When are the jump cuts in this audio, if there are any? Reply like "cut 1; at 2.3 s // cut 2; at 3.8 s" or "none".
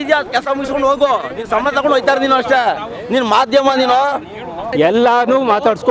cut 1; at 4.7 s